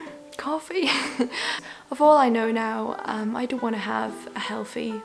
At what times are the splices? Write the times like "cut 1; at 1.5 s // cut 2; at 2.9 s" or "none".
cut 1; at 1.6 s